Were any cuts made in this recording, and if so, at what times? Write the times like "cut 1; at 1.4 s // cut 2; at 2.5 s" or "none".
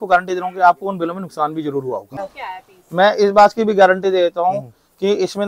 cut 1; at 2.3 s